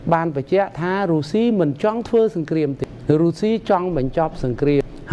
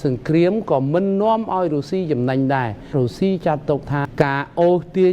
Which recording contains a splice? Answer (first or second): second